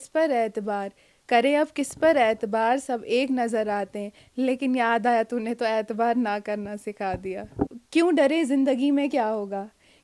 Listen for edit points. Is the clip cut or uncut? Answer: cut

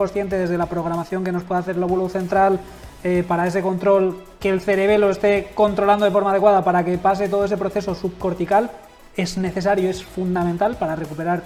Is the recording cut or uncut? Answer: uncut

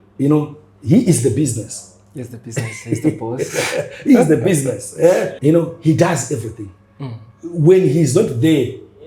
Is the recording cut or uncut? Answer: cut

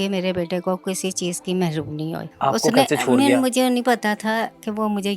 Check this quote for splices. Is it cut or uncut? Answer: cut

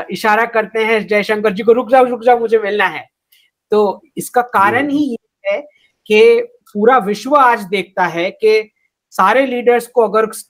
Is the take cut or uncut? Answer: uncut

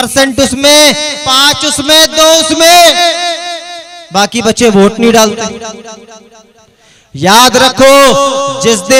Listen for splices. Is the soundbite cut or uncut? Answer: uncut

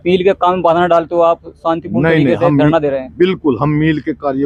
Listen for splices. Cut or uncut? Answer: uncut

